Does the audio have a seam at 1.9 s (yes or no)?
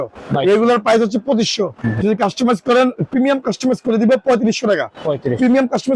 yes